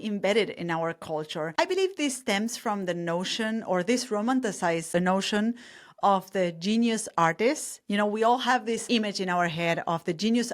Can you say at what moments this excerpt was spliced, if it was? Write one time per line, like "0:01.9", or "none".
0:04.9
0:08.8